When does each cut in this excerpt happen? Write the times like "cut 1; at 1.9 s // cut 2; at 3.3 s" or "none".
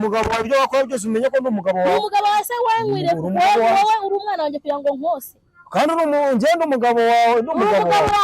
none